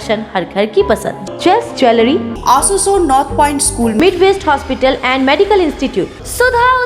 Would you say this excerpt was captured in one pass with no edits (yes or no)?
no